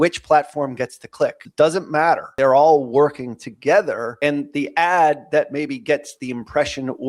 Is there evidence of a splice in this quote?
yes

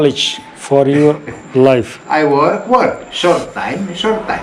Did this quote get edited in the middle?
no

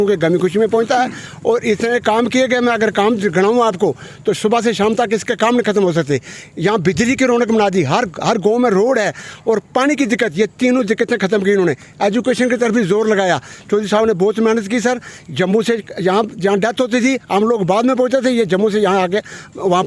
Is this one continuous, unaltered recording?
yes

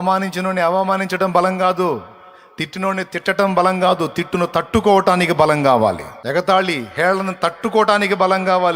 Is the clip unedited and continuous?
no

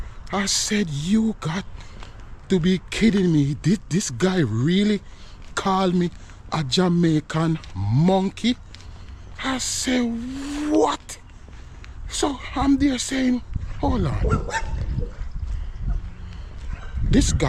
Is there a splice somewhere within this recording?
no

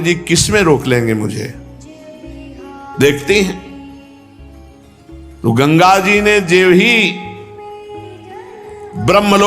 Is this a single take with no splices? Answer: no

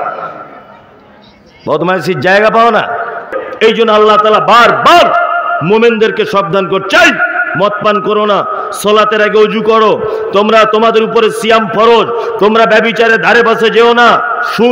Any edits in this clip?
yes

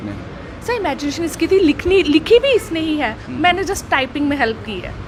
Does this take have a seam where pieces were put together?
no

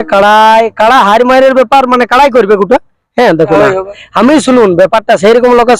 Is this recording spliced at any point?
yes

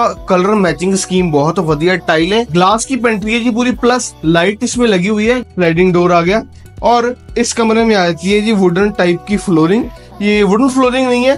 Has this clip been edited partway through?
yes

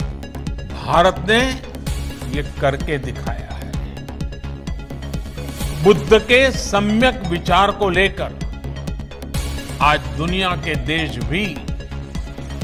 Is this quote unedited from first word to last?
yes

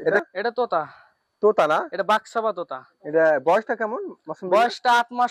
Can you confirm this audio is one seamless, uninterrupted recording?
yes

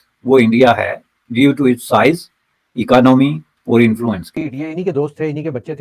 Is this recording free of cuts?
no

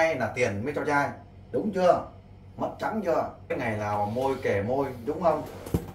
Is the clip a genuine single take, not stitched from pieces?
no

